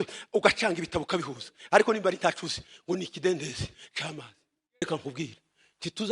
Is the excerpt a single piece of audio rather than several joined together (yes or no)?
no